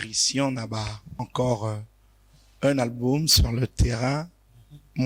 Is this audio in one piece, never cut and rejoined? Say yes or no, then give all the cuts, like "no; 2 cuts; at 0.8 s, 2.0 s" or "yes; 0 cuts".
no; 1 cut; at 1.3 s